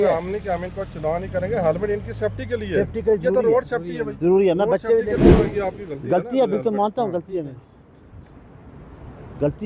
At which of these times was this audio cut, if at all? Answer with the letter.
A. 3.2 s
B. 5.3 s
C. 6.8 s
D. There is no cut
B